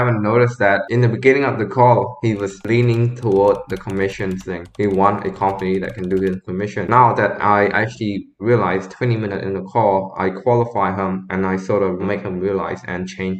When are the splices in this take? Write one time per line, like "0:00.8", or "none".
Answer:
0:00.9
0:06.8

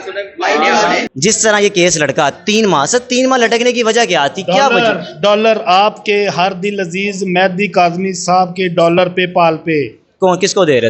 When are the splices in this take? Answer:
0:01.1

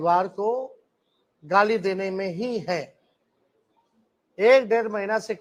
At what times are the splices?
none

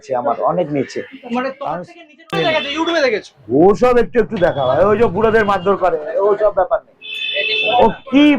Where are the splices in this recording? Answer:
0:02.3

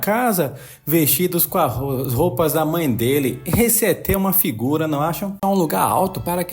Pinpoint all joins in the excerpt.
0:05.4

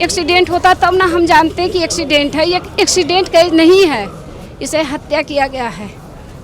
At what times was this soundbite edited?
none

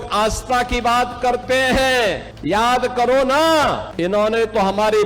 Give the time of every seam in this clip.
0:02.3
0:03.9

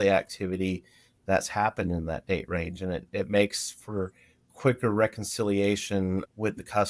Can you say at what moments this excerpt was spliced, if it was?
none

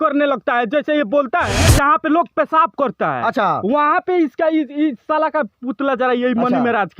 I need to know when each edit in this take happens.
0:01.6

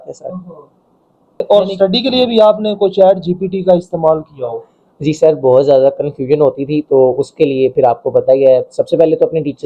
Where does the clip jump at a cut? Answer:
none

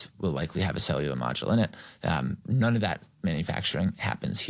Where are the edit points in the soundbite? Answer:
0:02.4

